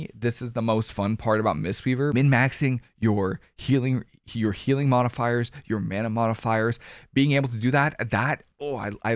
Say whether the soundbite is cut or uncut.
cut